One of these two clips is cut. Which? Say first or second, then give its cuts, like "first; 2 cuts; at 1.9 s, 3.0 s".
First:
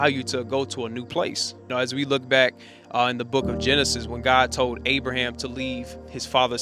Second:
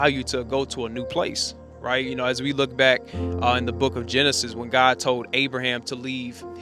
first; 1 cut; at 1.7 s